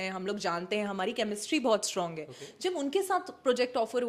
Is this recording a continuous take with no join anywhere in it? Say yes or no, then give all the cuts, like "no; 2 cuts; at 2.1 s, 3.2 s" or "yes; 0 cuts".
yes; 0 cuts